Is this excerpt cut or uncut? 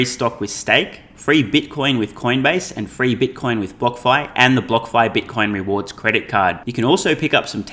uncut